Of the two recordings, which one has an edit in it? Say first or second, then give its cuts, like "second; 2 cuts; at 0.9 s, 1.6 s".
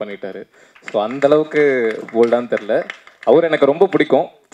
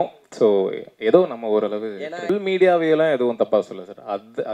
second; 1 cut; at 2.3 s